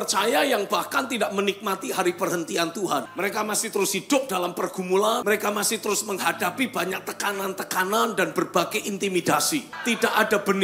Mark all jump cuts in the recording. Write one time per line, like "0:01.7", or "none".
0:03.1
0:05.2
0:09.7